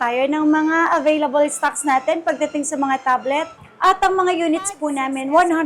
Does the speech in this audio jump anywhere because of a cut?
yes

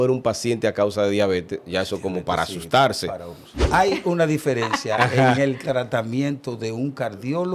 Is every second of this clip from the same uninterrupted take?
no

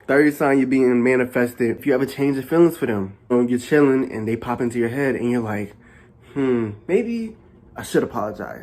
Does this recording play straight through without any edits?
no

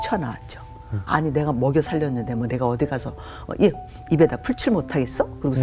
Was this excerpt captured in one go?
no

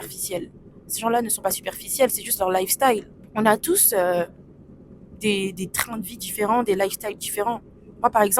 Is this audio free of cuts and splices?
no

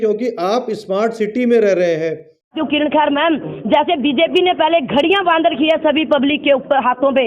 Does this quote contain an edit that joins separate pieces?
yes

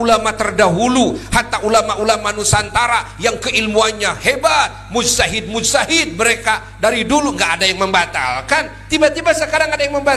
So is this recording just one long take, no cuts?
yes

